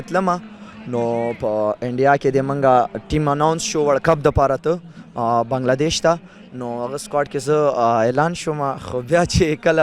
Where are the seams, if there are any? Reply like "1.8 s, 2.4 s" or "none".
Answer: none